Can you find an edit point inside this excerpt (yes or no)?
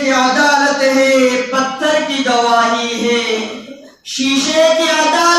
no